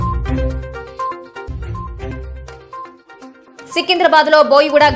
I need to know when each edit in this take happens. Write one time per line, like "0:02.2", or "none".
0:01.3